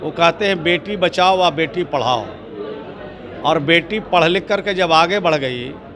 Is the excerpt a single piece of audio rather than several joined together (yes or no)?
yes